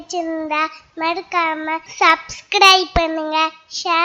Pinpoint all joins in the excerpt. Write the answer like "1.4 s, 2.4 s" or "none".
1.9 s